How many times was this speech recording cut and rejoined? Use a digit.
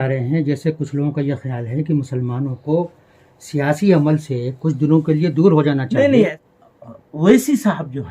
1